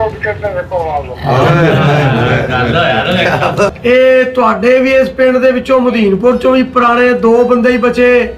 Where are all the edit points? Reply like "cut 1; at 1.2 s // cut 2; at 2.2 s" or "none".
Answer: cut 1; at 3.7 s